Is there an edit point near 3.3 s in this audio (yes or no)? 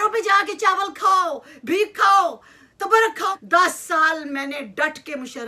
yes